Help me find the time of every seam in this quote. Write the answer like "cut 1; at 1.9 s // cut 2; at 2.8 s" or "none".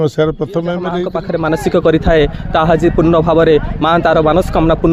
cut 1; at 1.1 s